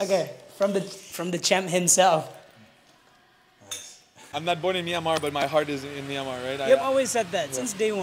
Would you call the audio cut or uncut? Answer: cut